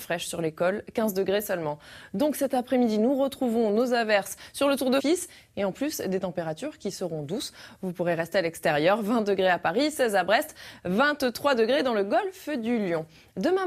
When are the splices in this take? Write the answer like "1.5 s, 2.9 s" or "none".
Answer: none